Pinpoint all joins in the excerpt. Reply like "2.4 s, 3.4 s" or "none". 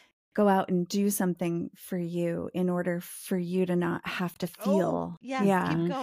5.1 s

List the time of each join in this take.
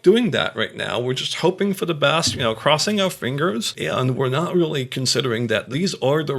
3.7 s

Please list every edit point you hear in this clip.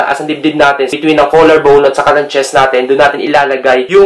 0.9 s

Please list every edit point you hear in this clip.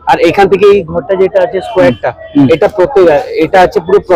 none

